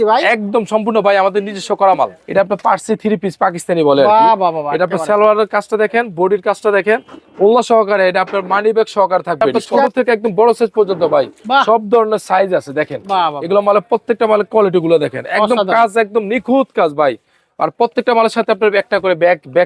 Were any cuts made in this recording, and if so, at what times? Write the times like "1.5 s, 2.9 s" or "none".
2.2 s, 9.9 s